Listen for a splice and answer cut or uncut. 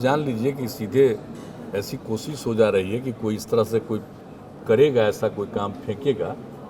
uncut